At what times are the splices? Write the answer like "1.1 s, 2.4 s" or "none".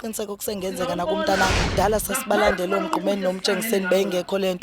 1.6 s